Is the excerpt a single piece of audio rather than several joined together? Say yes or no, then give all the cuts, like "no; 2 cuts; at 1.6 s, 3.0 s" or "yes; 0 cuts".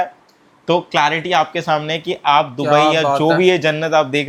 yes; 0 cuts